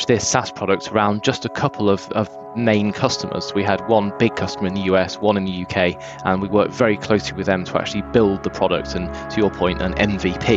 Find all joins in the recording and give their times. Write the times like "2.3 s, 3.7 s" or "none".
none